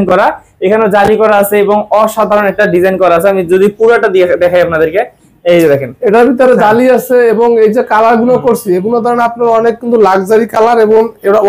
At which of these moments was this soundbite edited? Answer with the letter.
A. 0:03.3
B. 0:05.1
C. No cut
C